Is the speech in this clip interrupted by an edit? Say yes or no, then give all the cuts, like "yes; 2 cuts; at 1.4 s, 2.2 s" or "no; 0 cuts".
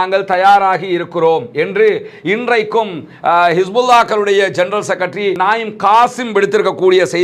no; 0 cuts